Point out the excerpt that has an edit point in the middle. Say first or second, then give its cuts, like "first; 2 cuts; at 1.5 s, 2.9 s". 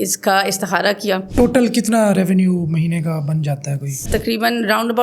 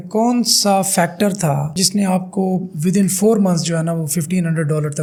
first; 2 cuts; at 1.2 s, 4.1 s